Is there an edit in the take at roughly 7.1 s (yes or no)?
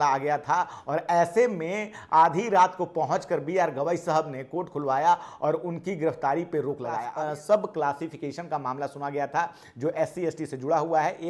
yes